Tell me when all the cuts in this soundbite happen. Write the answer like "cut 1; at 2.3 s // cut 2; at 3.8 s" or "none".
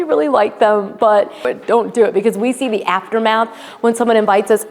cut 1; at 1.5 s